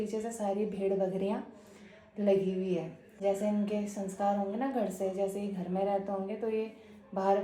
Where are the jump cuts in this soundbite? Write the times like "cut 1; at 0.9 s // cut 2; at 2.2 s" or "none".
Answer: cut 1; at 3.0 s